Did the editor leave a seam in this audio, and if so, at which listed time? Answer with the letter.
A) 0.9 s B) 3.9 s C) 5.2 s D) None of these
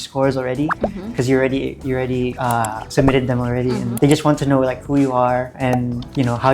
B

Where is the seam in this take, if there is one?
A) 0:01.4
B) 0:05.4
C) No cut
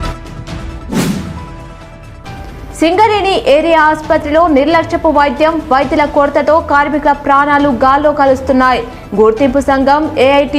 A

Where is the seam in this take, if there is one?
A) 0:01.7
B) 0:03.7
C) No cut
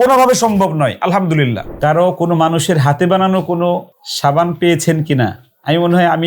A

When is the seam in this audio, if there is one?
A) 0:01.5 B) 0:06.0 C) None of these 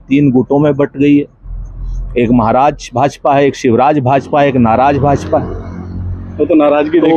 C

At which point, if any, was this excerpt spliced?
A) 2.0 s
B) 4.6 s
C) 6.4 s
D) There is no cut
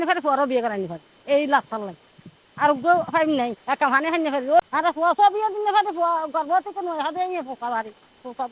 B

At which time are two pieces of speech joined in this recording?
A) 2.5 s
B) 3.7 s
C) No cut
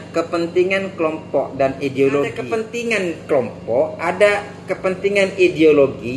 A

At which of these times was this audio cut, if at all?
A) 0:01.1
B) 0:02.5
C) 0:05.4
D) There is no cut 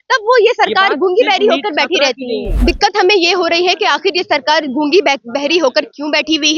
B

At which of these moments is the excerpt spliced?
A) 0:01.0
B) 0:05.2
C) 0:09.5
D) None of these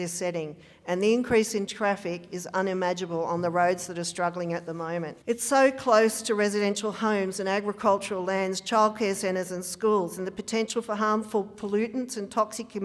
B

